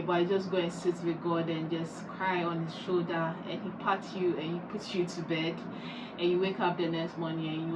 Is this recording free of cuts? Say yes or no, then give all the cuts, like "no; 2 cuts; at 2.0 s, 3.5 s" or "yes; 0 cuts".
yes; 0 cuts